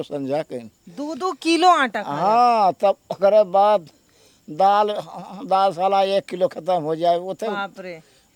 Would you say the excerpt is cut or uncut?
uncut